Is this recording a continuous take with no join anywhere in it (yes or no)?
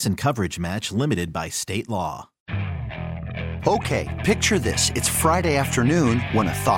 no